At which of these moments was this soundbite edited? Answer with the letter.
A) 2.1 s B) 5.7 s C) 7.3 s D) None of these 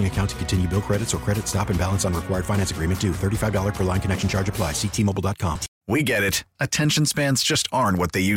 B